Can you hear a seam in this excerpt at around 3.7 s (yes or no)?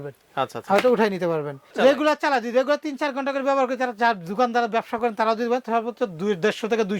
no